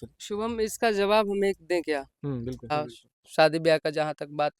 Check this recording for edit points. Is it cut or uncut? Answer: cut